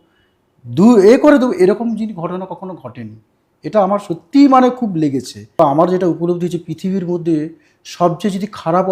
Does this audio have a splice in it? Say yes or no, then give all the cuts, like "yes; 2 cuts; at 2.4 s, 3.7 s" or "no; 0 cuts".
yes; 1 cut; at 5.5 s